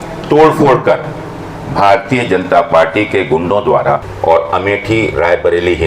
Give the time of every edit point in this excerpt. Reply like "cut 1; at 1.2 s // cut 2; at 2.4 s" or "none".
cut 1; at 4.1 s

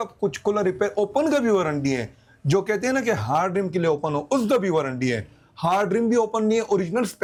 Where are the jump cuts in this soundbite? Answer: none

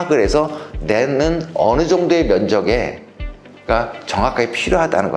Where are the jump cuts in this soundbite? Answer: none

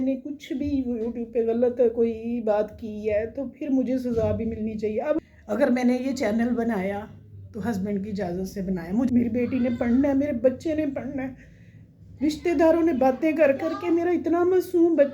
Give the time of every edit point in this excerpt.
cut 1; at 5.2 s // cut 2; at 9.1 s

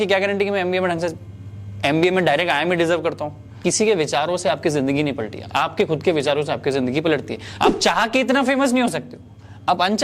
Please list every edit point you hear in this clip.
cut 1; at 3.6 s // cut 2; at 7.4 s

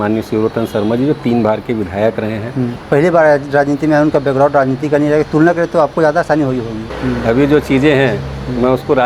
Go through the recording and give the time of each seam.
cut 1; at 2.8 s // cut 2; at 6.9 s

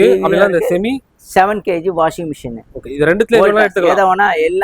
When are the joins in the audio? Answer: none

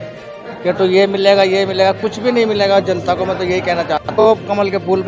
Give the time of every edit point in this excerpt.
cut 1; at 4.2 s

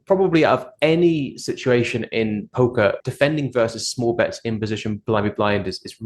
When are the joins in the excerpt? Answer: cut 1; at 3.0 s

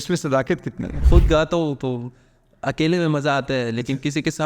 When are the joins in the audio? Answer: cut 1; at 0.9 s

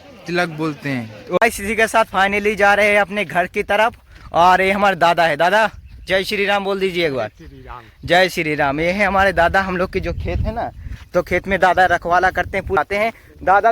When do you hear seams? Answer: cut 1; at 1.4 s // cut 2; at 12.8 s

